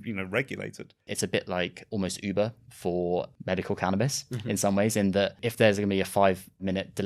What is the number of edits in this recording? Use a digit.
1